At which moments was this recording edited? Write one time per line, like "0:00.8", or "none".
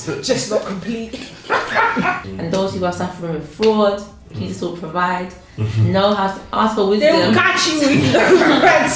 0:02.3